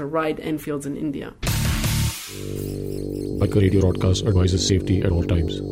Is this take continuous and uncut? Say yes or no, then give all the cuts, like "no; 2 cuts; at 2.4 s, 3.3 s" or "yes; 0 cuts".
no; 1 cut; at 1.3 s